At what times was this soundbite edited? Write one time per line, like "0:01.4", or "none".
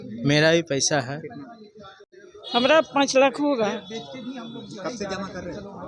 0:02.2